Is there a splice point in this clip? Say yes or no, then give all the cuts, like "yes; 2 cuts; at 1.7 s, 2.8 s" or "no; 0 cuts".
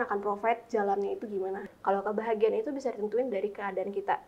yes; 1 cut; at 1.7 s